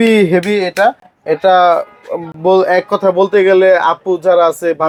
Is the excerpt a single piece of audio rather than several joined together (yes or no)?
yes